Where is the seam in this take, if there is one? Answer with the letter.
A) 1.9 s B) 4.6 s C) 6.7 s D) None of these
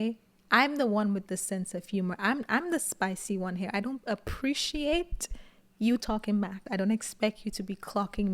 C